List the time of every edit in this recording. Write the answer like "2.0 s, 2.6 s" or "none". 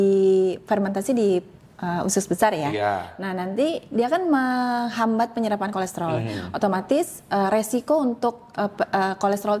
none